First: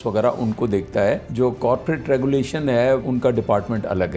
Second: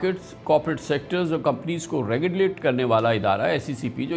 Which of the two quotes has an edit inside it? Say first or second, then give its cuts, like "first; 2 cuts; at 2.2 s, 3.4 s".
first; 2 cuts; at 1.3 s, 3.0 s